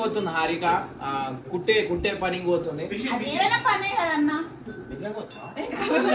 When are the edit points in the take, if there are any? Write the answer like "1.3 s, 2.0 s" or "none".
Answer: none